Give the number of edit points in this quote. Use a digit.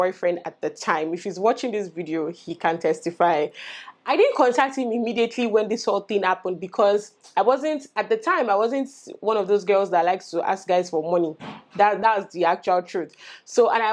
0